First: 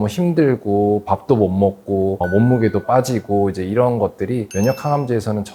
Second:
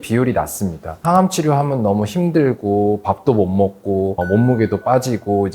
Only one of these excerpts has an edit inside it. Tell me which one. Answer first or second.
second